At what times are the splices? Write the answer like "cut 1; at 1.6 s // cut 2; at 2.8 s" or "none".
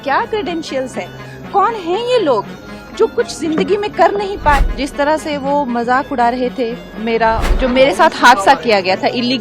cut 1; at 4.7 s // cut 2; at 7.4 s